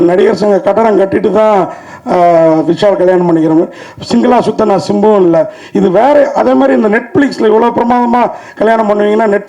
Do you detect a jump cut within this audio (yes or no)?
no